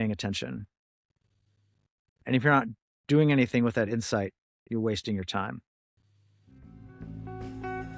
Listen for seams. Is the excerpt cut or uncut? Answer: uncut